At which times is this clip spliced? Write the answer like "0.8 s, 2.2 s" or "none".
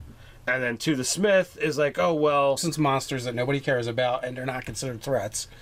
none